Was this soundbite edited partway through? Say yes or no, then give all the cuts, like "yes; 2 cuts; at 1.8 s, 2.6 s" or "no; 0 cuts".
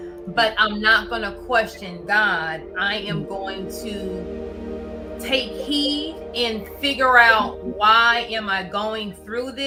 no; 0 cuts